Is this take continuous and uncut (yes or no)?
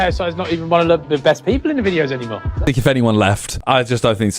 no